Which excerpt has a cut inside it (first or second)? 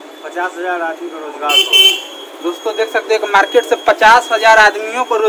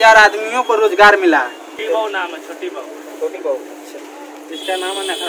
second